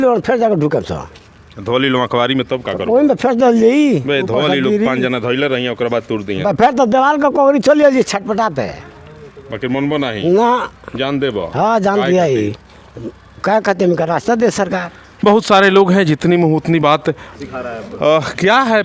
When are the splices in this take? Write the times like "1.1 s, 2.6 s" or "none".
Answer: none